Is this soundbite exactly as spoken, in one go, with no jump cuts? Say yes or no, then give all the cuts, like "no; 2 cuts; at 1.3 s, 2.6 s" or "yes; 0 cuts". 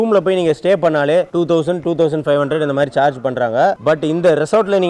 yes; 0 cuts